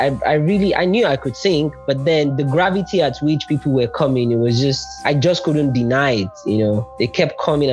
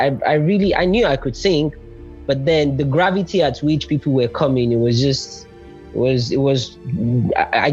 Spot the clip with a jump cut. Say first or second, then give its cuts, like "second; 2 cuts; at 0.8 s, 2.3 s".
first; 3 cuts; at 1.8 s, 5.0 s, 6.9 s